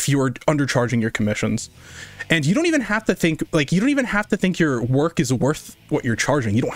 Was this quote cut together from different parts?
no; 0 cuts

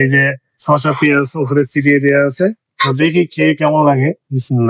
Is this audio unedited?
no; 1 cut; at 2.6 s

